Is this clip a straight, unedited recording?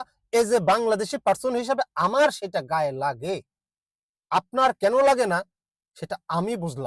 yes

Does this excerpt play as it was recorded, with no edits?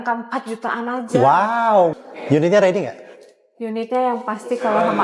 no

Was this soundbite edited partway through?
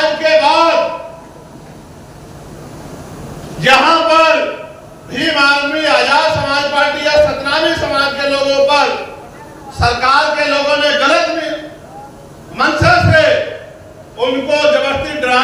no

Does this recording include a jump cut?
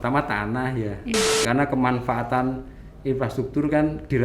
yes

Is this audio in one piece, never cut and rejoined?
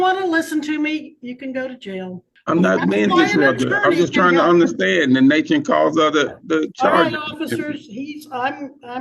no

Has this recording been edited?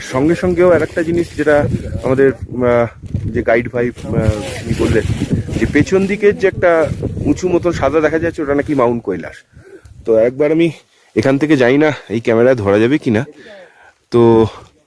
no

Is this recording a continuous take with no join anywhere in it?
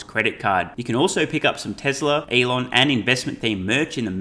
no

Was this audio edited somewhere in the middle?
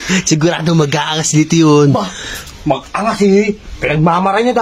no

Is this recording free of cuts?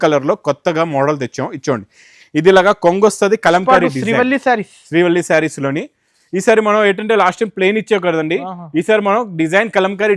yes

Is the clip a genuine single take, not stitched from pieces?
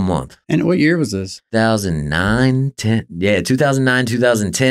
no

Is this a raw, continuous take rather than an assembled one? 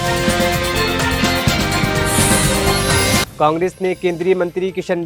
no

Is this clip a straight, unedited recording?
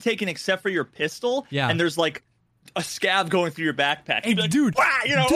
yes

